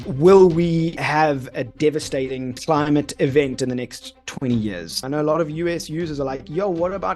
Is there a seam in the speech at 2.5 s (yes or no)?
yes